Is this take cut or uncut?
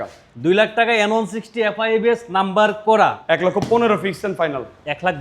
cut